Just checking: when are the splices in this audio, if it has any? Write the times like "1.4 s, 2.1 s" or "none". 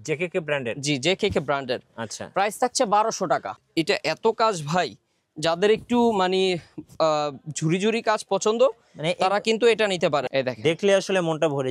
3.6 s, 10.3 s